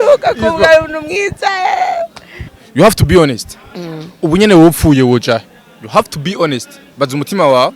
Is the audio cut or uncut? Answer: cut